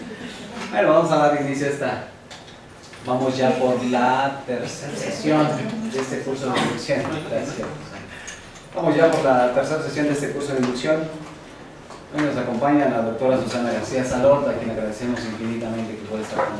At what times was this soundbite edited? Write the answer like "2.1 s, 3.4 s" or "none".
none